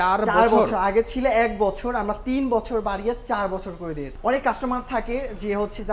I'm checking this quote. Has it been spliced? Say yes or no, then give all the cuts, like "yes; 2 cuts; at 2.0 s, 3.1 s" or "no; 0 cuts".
yes; 1 cut; at 4.1 s